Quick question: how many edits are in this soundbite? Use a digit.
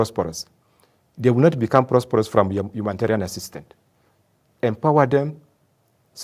0